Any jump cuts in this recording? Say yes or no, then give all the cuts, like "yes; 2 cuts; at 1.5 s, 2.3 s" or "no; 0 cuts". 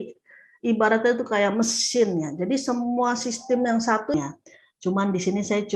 yes; 1 cut; at 4.1 s